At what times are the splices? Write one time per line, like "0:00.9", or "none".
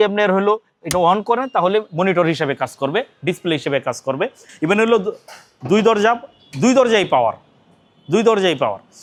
none